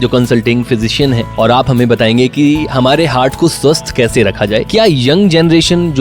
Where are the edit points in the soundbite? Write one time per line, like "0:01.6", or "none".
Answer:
0:01.3
0:04.7